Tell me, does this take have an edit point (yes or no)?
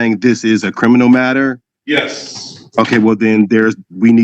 yes